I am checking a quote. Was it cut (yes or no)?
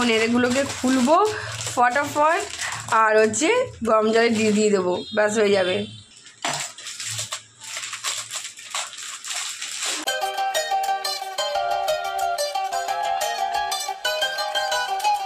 no